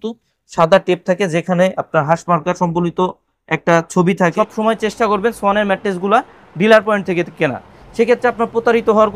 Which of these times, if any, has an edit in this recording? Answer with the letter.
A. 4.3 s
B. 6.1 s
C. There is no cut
A